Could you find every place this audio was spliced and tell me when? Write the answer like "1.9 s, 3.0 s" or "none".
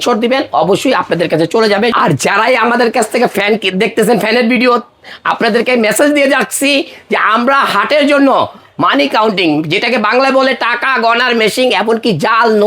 1.9 s